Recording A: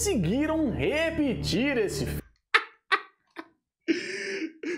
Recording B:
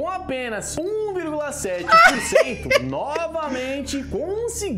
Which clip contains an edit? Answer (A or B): A